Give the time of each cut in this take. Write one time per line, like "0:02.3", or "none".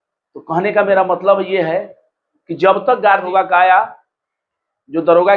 0:03.3